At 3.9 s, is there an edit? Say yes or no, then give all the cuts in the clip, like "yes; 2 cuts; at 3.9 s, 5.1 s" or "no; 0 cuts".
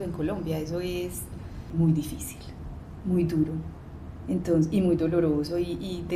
no; 1 cut; at 1.6 s